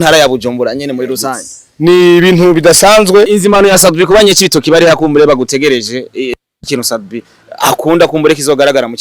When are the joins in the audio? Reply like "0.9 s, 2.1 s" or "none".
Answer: 3.3 s